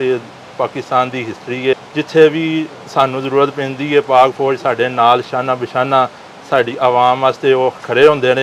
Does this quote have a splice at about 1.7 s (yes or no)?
yes